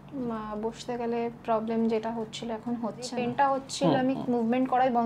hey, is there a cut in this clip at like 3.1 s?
yes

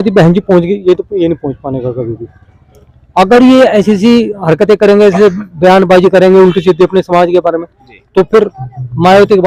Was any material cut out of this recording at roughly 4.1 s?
no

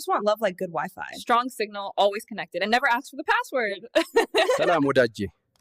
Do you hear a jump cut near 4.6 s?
yes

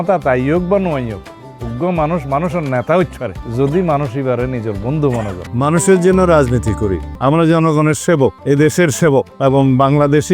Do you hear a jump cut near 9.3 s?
yes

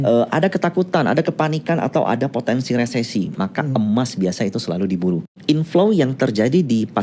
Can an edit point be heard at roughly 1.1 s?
no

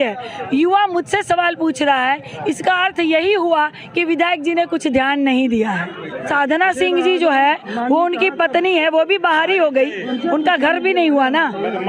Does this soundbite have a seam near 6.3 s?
yes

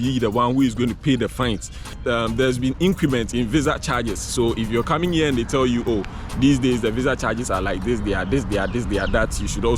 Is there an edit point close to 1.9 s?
yes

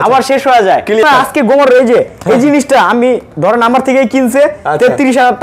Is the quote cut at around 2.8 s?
no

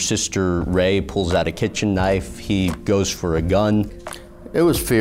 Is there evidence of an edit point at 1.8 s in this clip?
no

